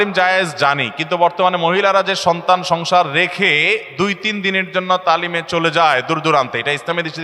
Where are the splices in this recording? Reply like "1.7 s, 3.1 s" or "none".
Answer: none